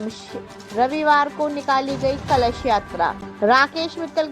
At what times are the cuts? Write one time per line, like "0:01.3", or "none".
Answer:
0:03.3